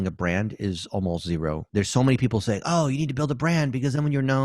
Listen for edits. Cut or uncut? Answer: cut